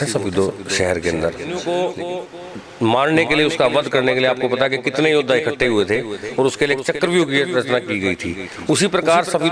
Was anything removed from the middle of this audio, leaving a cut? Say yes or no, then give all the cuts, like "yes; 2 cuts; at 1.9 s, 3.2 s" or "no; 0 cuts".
yes; 1 cut; at 1.6 s